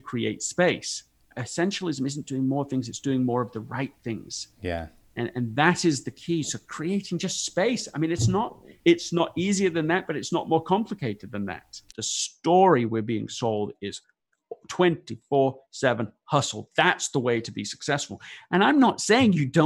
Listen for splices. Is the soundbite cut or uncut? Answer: cut